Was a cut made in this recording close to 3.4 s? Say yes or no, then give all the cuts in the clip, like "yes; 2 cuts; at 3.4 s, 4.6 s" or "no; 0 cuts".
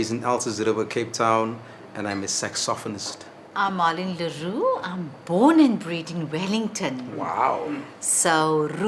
yes; 1 cut; at 3.4 s